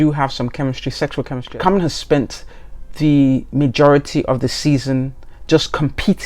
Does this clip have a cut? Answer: yes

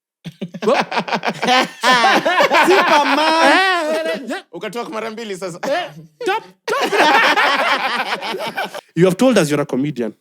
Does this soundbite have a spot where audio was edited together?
yes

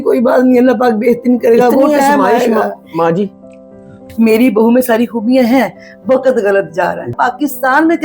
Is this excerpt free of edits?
no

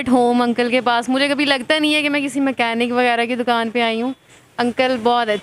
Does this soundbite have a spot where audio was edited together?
no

